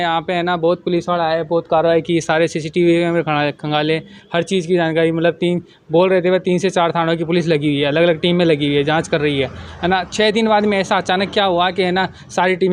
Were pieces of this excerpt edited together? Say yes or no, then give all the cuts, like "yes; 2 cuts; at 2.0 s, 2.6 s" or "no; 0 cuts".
no; 0 cuts